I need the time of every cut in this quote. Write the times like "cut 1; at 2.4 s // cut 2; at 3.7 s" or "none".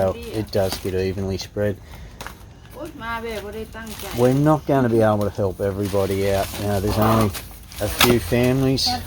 cut 1; at 2.5 s